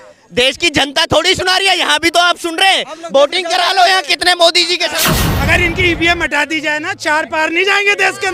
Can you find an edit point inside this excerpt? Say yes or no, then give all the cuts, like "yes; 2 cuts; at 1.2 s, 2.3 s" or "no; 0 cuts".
yes; 1 cut; at 5.0 s